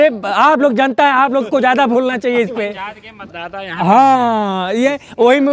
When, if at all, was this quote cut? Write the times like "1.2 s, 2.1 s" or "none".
none